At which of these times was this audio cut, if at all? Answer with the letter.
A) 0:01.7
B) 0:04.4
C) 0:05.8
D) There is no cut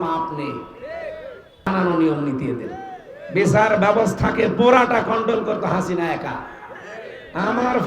A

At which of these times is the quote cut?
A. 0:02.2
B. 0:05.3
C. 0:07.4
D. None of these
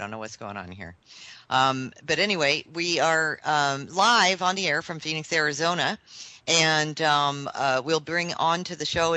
B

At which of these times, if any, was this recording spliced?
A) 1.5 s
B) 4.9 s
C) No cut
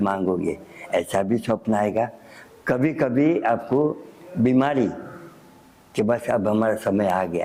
C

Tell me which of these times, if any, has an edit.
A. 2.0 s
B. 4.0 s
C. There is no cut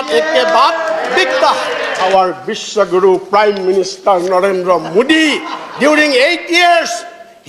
A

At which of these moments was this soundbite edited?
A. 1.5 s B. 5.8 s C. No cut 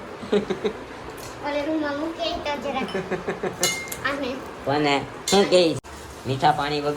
B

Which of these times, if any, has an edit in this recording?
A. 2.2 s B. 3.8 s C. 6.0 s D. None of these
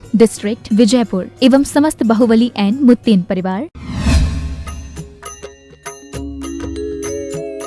B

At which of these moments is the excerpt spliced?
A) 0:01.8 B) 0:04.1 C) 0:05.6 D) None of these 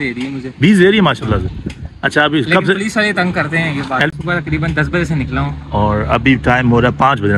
B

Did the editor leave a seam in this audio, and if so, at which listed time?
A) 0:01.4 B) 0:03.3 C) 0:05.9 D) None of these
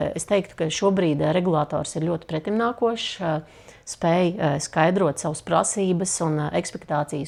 D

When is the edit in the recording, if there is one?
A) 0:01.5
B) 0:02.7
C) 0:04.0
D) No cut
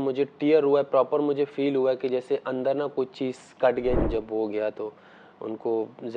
C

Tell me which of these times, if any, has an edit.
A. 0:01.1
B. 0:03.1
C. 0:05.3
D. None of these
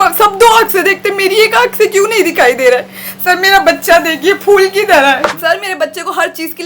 C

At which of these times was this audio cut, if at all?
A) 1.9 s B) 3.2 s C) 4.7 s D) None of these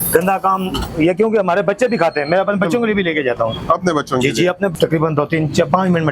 C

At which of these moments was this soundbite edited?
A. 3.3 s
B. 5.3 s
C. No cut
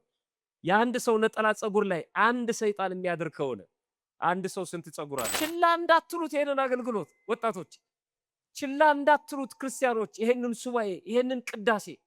B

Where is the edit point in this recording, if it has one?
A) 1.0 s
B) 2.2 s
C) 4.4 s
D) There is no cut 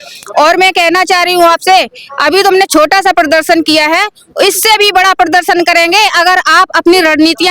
D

